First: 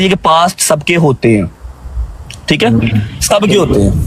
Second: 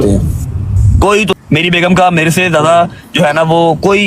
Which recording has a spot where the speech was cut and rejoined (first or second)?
second